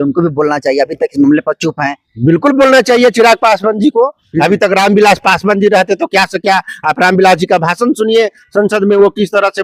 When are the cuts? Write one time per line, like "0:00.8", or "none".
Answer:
none